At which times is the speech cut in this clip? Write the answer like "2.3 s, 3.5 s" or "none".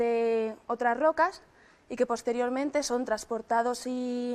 2.2 s